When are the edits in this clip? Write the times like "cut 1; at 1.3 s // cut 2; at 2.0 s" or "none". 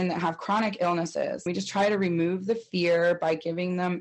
cut 1; at 1.5 s